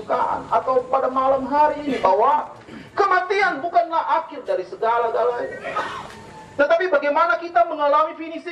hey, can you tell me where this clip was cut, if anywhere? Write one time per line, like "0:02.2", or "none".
none